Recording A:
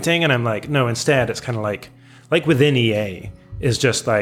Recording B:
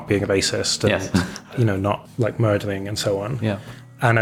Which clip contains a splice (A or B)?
B